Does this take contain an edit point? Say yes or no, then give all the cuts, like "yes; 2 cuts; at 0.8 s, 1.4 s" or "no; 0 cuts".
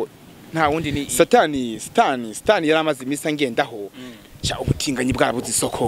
yes; 1 cut; at 1.0 s